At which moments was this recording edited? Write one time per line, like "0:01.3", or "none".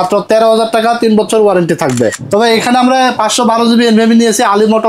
0:02.2